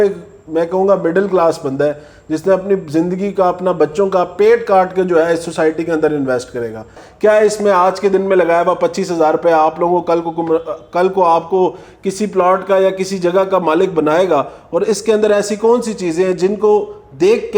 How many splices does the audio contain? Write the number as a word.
one